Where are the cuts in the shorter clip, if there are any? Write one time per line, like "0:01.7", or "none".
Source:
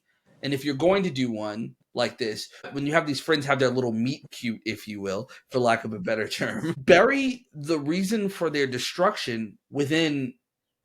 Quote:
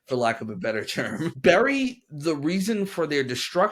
none